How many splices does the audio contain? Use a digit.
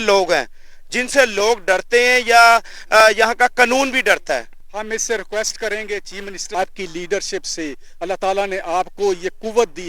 1